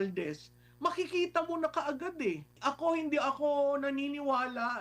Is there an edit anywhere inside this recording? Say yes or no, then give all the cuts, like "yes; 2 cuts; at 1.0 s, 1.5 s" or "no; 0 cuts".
yes; 1 cut; at 2.6 s